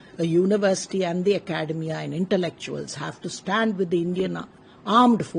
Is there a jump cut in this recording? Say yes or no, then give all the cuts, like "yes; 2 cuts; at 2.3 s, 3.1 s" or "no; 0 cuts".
no; 0 cuts